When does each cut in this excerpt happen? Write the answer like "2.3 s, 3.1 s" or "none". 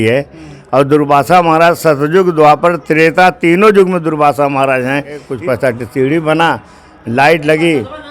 5.3 s